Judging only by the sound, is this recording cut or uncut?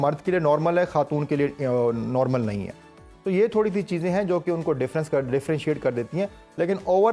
uncut